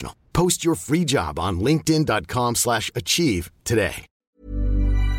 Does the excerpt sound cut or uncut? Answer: cut